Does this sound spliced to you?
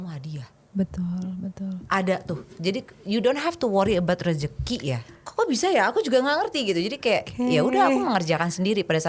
yes; 1 cut; at 5.1 s

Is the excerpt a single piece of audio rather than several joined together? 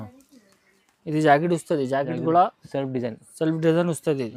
yes; 0 cuts

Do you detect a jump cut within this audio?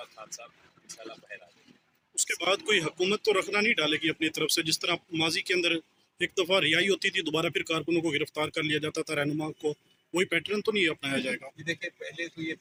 no; 0 cuts

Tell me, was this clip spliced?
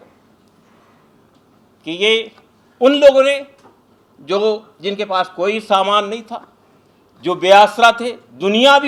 no; 0 cuts

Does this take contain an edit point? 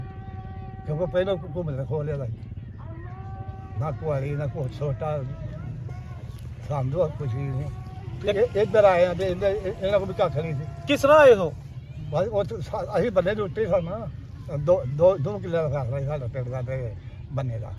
no; 0 cuts

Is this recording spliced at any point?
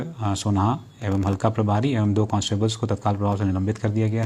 no; 0 cuts

